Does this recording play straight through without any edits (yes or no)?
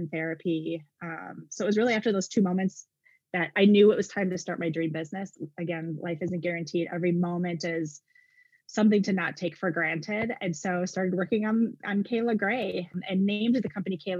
yes